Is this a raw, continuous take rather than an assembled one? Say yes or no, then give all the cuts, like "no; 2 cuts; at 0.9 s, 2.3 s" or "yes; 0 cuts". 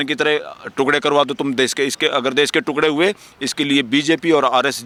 yes; 0 cuts